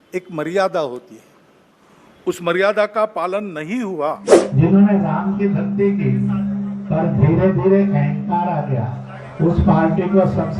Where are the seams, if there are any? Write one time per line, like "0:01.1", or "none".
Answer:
0:04.4